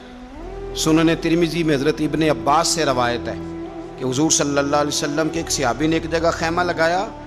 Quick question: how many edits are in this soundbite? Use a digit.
0